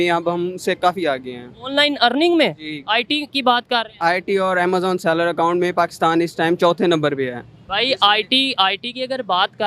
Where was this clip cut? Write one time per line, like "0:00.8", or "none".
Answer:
0:01.7